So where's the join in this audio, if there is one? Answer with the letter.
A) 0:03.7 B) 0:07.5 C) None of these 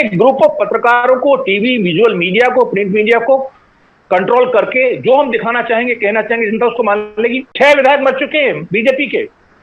B